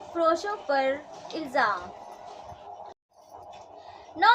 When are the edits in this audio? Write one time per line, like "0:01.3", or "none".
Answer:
0:03.1